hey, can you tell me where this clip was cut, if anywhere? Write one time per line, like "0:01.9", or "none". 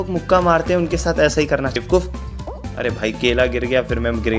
0:01.8